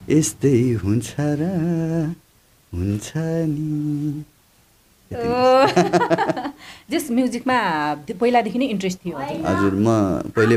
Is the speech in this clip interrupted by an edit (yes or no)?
no